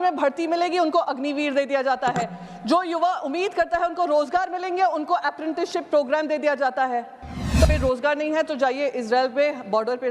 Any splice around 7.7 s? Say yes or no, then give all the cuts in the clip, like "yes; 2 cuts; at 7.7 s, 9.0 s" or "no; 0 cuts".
yes; 1 cut; at 7.7 s